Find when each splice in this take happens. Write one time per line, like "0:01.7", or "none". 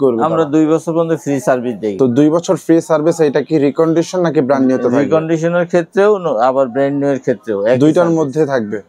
none